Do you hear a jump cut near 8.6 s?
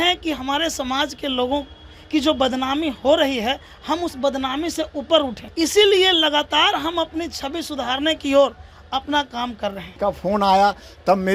no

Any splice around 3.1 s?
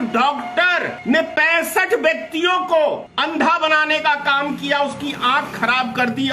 yes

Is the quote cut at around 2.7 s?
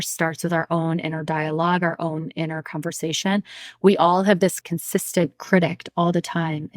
no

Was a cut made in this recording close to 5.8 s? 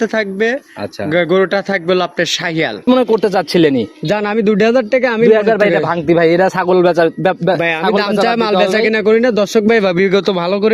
no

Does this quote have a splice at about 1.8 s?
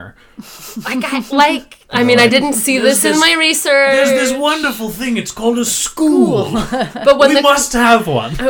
yes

